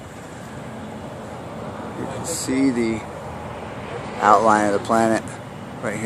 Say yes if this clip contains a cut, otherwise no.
no